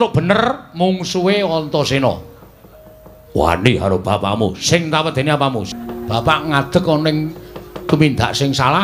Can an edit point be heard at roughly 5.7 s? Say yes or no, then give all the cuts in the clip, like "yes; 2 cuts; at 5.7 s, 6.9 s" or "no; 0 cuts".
yes; 1 cut; at 5.7 s